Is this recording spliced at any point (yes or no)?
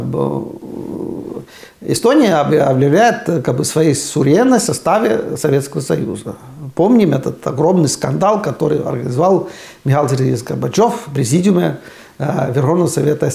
no